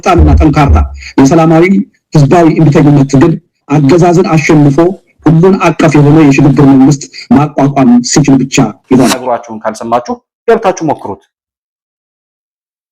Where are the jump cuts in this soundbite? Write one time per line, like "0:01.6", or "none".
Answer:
0:09.2